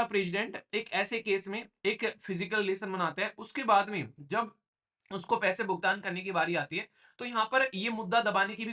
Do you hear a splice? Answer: no; 0 cuts

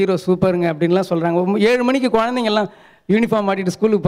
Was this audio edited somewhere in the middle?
no; 0 cuts

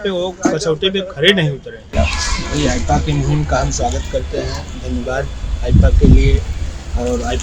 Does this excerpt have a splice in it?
yes; 1 cut; at 2.0 s

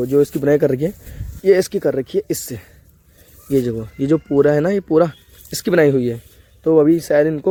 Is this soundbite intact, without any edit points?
yes; 0 cuts

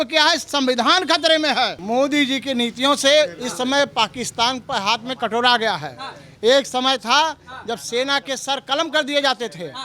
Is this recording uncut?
no; 1 cut; at 1.8 s

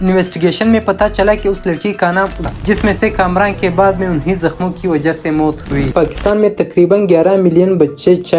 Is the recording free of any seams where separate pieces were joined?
no; 2 cuts; at 2.5 s, 5.9 s

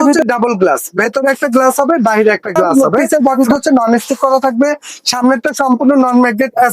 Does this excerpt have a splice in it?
yes; 1 cut; at 2.7 s

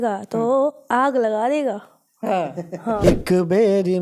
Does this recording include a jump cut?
yes; 1 cut; at 3.0 s

